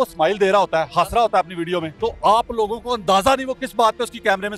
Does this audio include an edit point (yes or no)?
yes